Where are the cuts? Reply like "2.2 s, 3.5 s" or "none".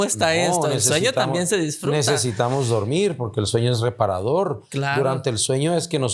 none